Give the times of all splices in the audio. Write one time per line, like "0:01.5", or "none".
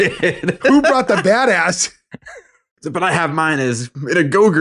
none